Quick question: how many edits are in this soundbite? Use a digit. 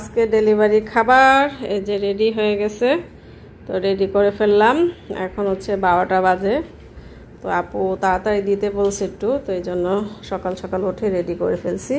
0